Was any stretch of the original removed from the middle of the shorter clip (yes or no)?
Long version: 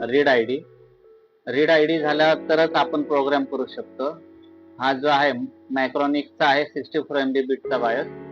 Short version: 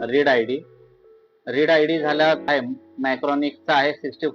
yes